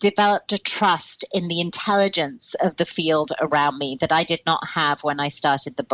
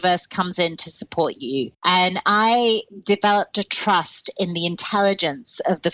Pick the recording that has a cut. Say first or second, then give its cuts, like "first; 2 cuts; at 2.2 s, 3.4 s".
second; 1 cut; at 1.7 s